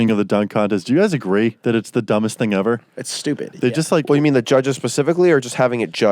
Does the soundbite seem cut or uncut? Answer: cut